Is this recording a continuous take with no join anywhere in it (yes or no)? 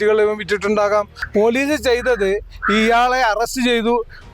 no